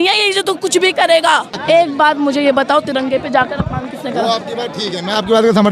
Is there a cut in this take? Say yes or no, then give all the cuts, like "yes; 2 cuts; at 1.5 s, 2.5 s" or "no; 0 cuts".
yes; 1 cut; at 1.5 s